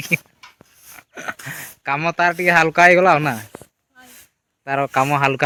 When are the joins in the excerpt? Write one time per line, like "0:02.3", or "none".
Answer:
none